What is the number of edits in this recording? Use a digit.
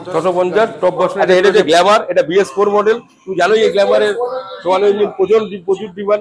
1